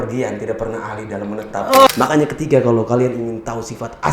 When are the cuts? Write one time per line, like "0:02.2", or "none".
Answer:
0:01.9